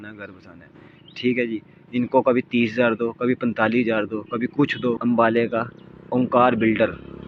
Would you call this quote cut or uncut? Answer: cut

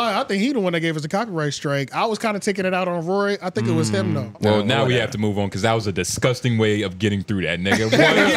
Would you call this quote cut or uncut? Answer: cut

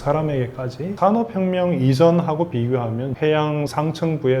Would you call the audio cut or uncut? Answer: cut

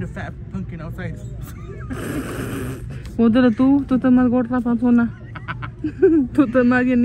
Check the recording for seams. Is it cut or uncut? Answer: uncut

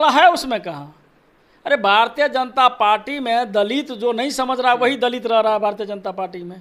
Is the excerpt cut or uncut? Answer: uncut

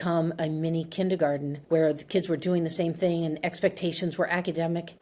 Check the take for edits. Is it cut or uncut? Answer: cut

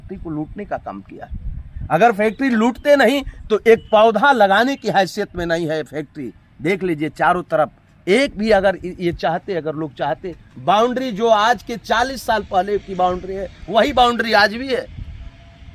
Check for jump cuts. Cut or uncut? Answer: uncut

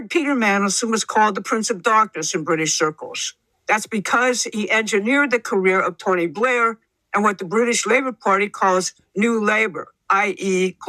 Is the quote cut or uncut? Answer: uncut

